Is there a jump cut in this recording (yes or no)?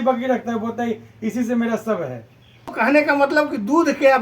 yes